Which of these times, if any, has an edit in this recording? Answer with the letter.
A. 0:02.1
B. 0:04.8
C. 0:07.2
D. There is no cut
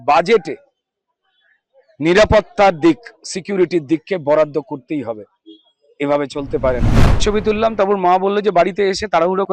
C